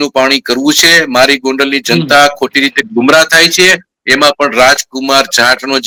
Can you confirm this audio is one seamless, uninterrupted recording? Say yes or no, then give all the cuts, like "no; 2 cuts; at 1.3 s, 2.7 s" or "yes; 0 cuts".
yes; 0 cuts